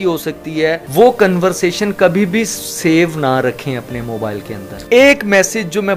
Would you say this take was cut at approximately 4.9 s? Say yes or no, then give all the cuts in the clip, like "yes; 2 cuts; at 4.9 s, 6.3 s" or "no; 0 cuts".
yes; 2 cuts; at 0.8 s, 4.9 s